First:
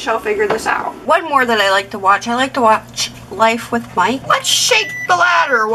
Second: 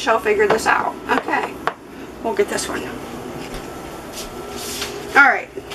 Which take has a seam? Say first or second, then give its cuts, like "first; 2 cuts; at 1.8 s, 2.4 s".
first; 2 cuts; at 1.0 s, 4.2 s